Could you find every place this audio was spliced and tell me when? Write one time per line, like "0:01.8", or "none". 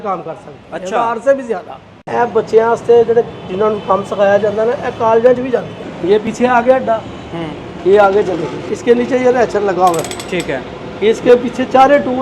0:02.0
0:06.1
0:08.7